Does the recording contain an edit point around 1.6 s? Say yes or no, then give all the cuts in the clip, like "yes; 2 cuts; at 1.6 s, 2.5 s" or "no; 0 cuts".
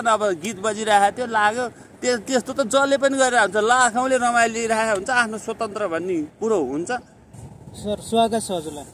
no; 0 cuts